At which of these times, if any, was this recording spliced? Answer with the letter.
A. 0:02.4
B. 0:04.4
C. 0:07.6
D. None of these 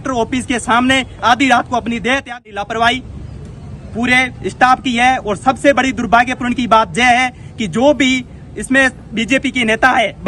A